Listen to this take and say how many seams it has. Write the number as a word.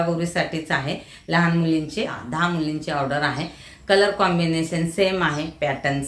one